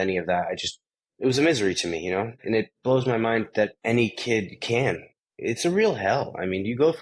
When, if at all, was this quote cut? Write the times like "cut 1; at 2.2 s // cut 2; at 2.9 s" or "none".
cut 1; at 2.4 s // cut 2; at 3.8 s // cut 3; at 5.1 s